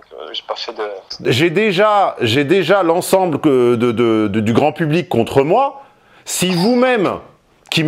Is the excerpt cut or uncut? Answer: cut